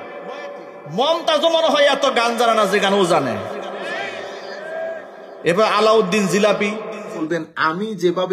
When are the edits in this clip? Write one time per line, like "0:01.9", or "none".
0:07.2